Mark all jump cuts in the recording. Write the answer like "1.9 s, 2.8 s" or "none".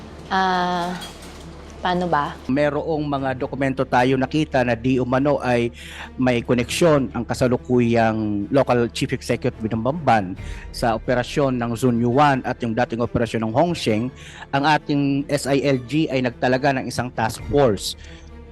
2.3 s